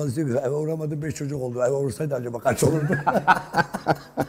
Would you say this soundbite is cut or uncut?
uncut